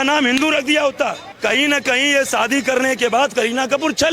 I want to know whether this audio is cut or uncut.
cut